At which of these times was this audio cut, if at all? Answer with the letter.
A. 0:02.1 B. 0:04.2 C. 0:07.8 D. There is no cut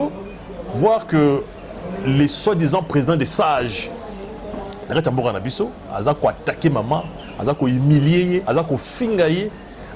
D